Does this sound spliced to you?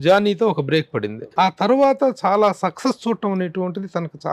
yes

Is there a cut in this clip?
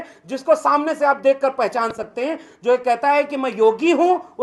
no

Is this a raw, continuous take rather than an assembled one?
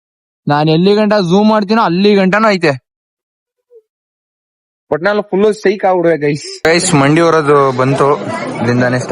no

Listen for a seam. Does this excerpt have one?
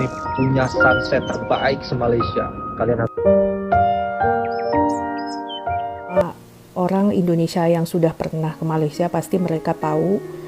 yes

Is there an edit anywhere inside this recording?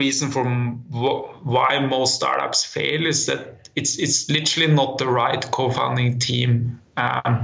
no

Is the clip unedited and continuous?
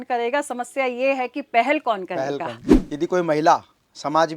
no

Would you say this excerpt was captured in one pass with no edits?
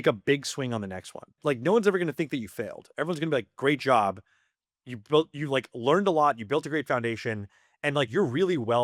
no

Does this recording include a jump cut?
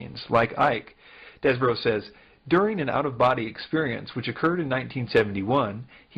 yes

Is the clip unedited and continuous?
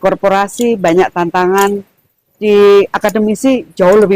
yes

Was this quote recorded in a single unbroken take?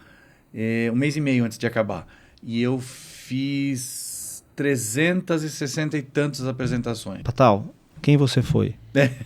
no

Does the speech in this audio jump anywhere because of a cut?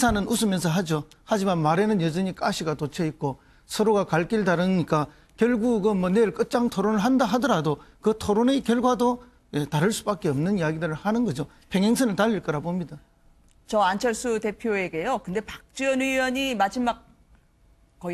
yes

